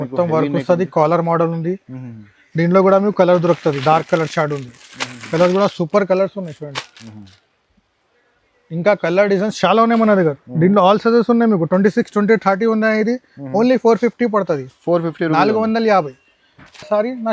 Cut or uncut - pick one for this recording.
uncut